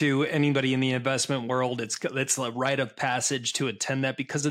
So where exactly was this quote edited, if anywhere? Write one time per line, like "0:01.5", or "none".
none